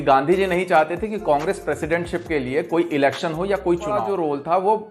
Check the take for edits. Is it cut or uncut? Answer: cut